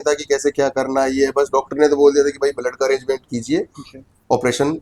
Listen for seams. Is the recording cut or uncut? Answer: uncut